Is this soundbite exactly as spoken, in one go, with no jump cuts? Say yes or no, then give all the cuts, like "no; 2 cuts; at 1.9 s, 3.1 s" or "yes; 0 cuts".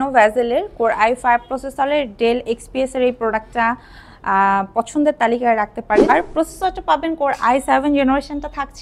no; 1 cut; at 6.1 s